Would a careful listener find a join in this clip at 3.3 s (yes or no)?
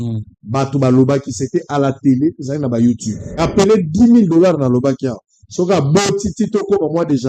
yes